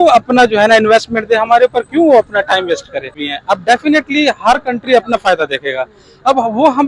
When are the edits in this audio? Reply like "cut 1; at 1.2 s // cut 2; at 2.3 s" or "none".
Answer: cut 1; at 3.1 s